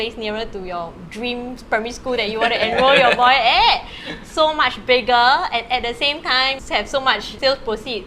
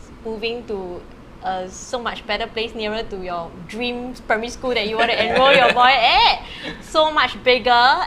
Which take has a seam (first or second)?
first